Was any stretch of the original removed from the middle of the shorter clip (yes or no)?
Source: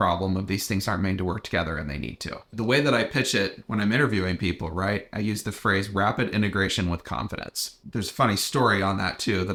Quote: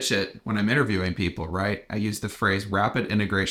no